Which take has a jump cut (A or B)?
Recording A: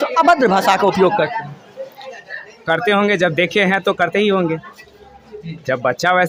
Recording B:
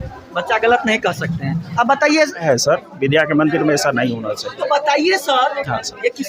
B